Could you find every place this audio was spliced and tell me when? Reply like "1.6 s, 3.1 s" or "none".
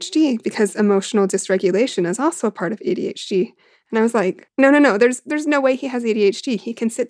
none